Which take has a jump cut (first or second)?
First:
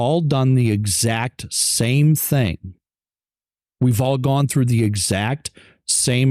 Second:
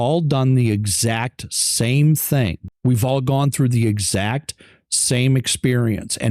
second